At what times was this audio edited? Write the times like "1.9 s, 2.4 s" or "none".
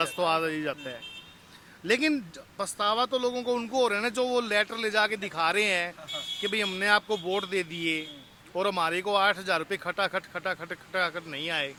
none